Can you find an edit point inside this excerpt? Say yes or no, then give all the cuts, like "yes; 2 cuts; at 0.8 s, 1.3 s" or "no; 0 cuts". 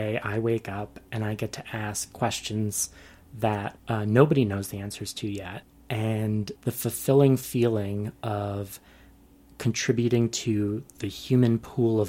yes; 3 cuts; at 3.8 s, 5.7 s, 6.5 s